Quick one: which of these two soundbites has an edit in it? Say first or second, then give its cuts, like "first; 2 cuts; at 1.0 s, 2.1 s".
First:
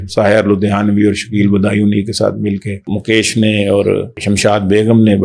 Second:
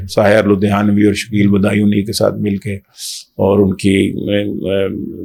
first; 2 cuts; at 2.9 s, 4.2 s